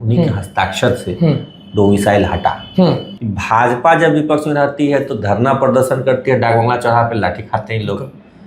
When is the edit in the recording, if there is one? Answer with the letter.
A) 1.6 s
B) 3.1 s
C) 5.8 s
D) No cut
B